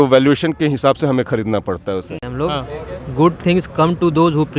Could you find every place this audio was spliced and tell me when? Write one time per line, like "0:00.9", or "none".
0:02.3